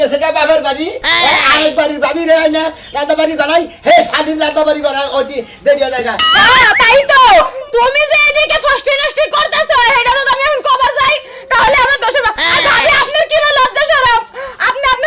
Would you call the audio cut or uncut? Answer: cut